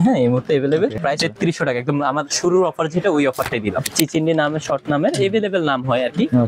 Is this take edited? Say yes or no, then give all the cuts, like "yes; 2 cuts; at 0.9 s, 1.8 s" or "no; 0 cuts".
yes; 2 cuts; at 1.0 s, 3.9 s